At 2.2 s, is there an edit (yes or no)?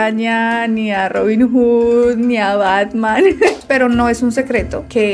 no